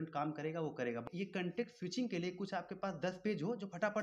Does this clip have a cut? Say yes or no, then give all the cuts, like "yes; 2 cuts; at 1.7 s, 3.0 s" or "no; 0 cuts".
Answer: yes; 1 cut; at 1.0 s